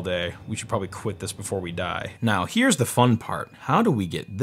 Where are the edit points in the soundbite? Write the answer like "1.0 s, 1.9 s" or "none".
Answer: 2.0 s